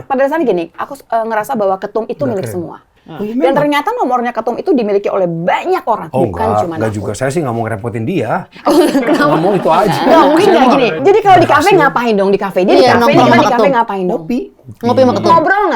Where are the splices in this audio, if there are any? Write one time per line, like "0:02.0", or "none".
0:10.9